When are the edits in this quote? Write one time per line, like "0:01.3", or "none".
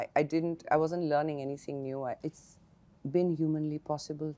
0:02.2